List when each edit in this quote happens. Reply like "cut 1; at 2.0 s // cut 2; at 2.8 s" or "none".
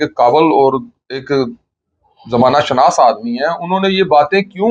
none